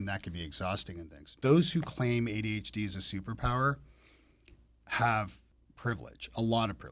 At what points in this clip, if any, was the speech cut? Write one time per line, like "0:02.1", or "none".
0:01.3
0:05.4